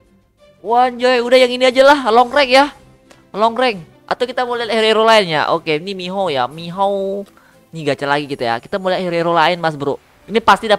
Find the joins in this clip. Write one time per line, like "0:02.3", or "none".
0:03.9